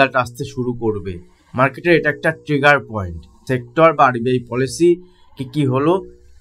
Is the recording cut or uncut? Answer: cut